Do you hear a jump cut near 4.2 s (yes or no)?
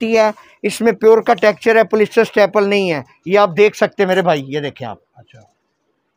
no